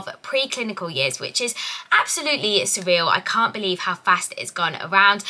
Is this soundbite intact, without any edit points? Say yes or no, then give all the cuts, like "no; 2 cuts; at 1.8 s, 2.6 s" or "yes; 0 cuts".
yes; 0 cuts